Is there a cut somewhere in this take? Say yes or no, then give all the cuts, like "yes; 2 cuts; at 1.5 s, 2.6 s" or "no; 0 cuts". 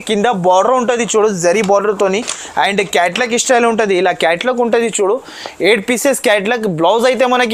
no; 0 cuts